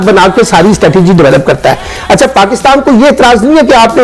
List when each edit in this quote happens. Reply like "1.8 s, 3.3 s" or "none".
none